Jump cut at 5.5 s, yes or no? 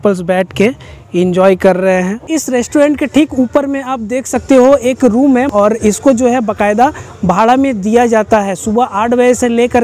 yes